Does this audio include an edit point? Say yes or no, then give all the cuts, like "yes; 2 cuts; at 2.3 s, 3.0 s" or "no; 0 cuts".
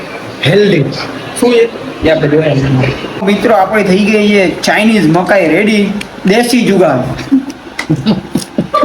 yes; 1 cut; at 3.2 s